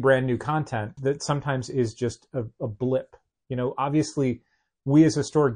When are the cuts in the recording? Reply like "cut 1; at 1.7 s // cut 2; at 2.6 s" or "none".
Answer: cut 1; at 0.9 s